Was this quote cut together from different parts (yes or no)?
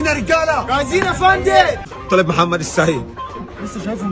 yes